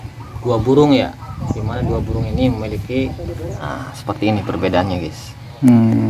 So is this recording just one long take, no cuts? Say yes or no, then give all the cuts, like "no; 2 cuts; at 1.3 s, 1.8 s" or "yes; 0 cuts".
no; 1 cut; at 3.6 s